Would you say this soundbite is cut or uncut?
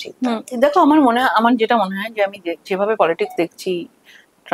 uncut